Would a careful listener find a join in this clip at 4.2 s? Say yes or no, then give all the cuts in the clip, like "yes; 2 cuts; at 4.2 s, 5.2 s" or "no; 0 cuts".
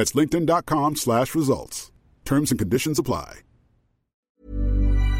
yes; 1 cut; at 4.2 s